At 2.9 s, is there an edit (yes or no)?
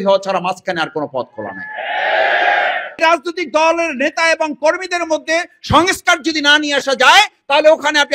yes